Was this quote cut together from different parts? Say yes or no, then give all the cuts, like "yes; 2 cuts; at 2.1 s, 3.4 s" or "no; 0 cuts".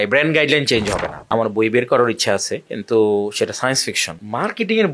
yes; 1 cut; at 1.3 s